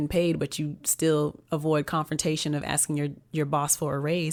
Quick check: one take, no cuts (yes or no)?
yes